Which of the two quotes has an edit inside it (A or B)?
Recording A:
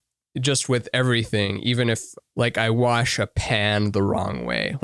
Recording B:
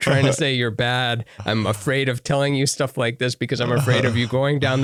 A